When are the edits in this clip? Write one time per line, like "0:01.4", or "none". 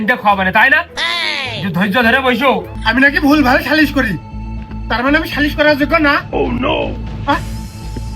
0:02.7